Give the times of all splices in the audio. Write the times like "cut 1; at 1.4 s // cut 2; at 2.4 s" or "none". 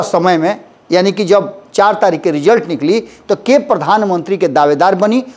none